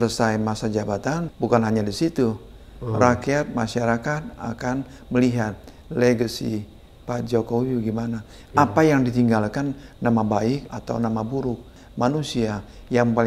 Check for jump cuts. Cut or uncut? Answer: cut